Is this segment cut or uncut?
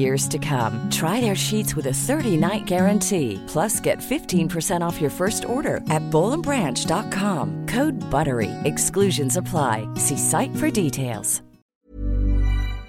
cut